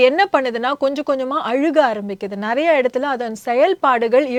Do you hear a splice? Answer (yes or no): no